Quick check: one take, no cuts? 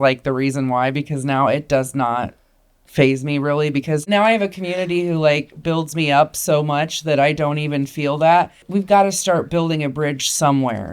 no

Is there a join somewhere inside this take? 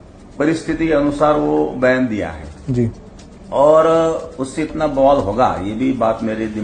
no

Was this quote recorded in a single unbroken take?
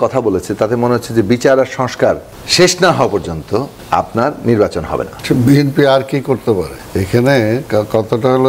no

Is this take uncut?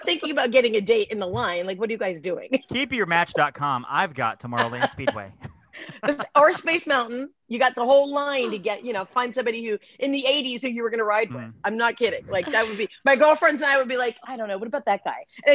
yes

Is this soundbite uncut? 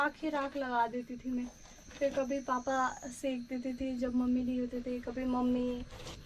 yes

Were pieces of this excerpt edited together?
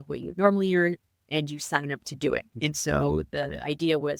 no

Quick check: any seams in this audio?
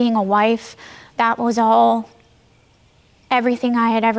no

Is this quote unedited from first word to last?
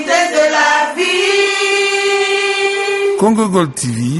yes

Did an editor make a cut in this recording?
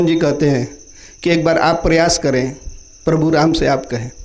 no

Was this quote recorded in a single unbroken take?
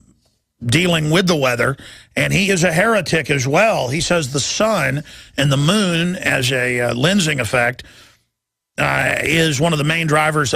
no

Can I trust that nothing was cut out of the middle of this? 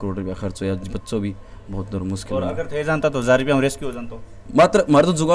yes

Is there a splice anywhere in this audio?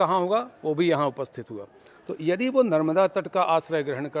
no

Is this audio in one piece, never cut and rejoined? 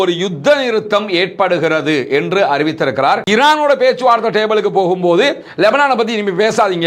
no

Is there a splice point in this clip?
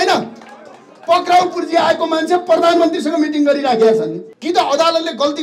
yes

